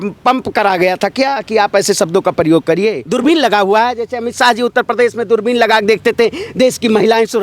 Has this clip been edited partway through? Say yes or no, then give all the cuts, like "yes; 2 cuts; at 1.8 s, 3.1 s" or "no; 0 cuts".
yes; 1 cut; at 3.0 s